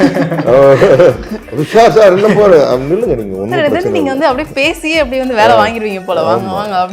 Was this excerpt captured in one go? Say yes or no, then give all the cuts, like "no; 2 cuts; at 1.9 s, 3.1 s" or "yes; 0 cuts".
yes; 0 cuts